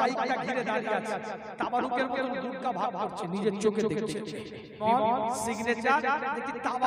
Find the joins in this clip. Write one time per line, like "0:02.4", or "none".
0:04.7